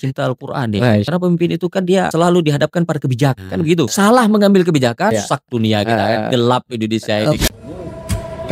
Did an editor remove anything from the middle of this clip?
yes; 5 cuts; at 1.1 s, 2.1 s, 3.4 s, 5.1 s, 7.4 s

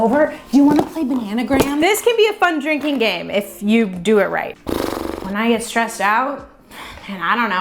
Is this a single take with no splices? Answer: yes; 0 cuts

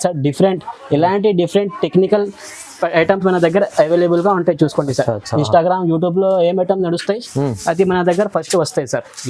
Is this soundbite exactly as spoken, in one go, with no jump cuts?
yes; 0 cuts

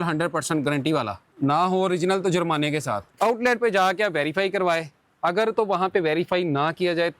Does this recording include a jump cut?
yes; 2 cuts; at 1.2 s, 3.1 s

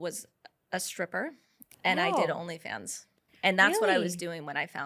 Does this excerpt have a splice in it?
no; 0 cuts

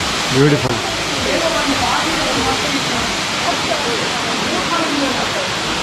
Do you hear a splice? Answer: no; 0 cuts

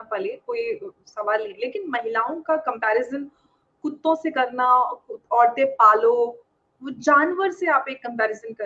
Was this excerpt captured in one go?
yes; 0 cuts

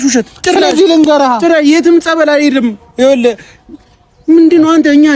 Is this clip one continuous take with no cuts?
yes; 0 cuts

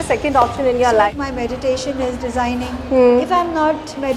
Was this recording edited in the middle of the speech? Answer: yes; 1 cut; at 1.1 s

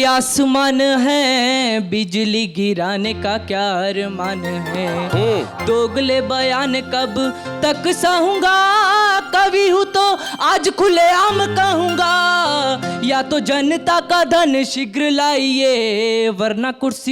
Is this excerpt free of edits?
yes; 0 cuts

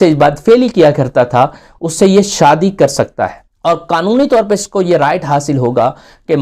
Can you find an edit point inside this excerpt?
yes; 1 cut; at 3.4 s

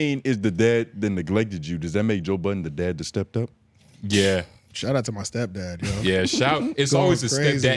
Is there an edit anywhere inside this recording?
no; 0 cuts

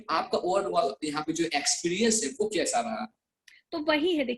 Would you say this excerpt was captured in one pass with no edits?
yes; 0 cuts

